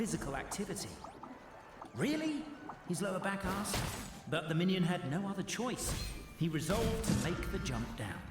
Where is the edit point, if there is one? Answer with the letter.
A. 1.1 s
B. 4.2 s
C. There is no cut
A